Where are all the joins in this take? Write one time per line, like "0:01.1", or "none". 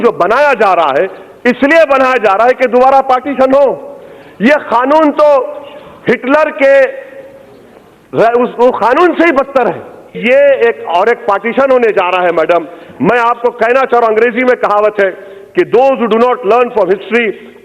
0:10.2